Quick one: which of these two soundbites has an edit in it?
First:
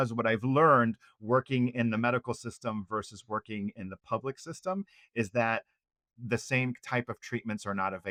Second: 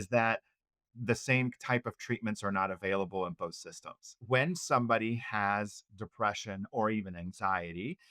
second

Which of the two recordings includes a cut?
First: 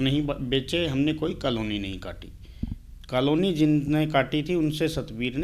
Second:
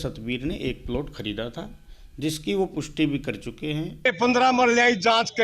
second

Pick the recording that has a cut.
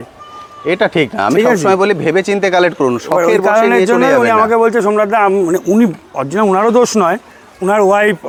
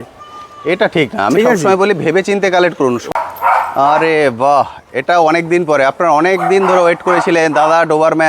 second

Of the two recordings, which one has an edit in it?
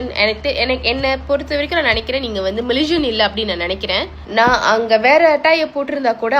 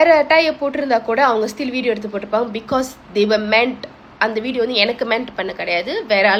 first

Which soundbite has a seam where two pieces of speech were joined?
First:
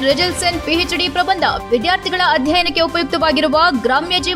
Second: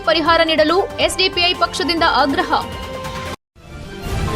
second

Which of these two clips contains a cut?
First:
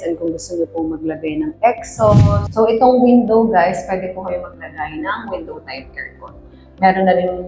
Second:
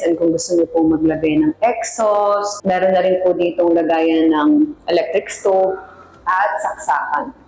first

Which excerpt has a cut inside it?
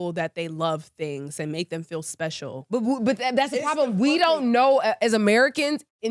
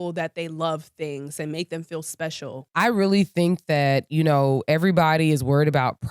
second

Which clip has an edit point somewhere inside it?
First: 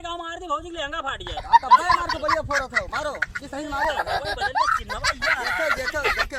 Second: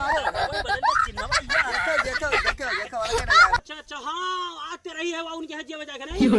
second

